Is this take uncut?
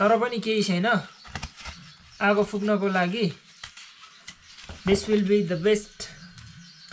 yes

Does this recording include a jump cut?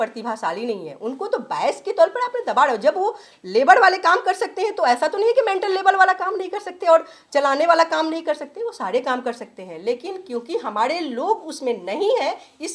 no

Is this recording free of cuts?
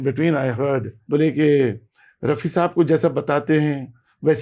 no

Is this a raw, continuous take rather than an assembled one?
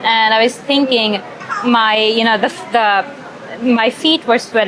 yes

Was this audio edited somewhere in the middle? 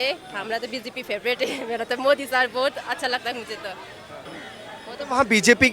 yes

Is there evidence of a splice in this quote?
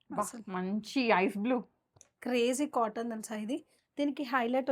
yes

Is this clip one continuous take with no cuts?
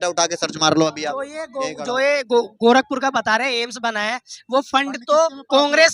yes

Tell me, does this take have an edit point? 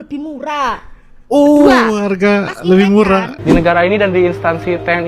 yes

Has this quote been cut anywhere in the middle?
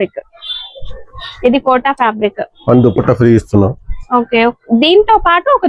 yes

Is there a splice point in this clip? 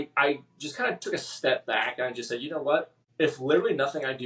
yes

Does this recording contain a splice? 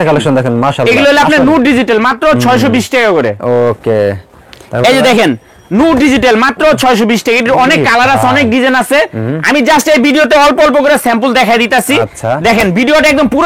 no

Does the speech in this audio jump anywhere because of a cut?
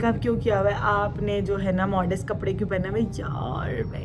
no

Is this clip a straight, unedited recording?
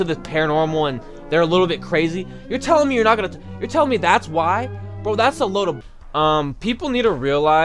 no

